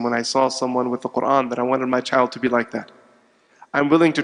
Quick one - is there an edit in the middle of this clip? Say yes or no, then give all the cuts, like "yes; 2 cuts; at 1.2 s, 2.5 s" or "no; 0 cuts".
no; 0 cuts